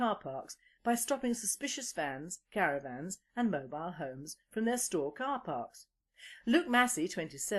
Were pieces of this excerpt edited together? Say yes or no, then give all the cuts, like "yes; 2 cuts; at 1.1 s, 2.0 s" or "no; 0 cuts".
no; 0 cuts